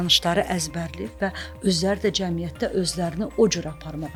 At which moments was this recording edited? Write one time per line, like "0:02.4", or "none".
none